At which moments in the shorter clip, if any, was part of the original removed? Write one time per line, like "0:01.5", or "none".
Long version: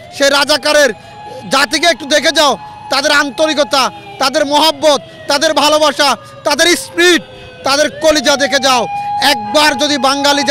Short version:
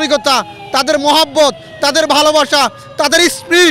none